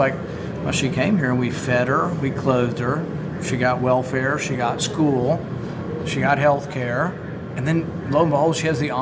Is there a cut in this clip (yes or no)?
no